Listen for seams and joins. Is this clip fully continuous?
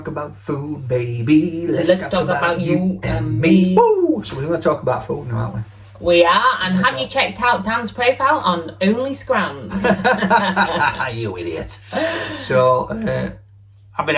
yes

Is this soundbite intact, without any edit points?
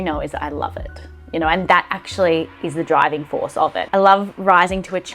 no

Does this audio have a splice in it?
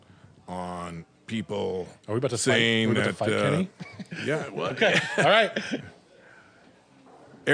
no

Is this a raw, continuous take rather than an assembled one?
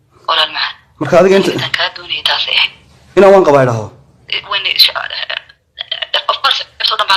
yes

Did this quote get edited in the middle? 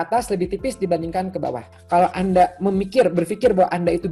yes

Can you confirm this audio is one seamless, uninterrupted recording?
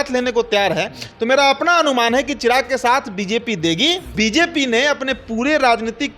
no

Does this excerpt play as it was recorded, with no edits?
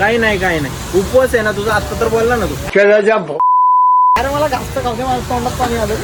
yes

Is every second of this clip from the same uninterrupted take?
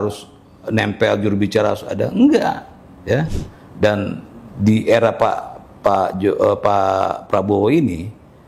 no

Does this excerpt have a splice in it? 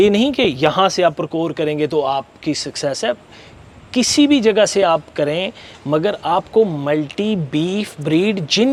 no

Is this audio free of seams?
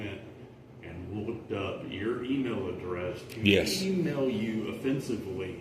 yes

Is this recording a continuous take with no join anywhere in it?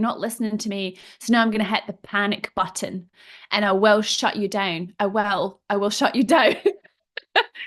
yes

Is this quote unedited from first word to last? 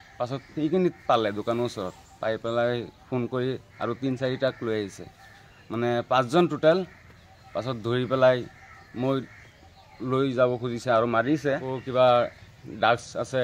no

